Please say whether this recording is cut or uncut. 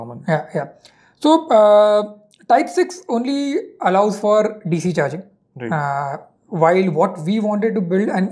uncut